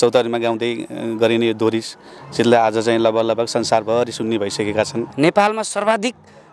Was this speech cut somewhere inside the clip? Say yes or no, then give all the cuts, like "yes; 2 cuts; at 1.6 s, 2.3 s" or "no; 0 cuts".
yes; 1 cut; at 5.0 s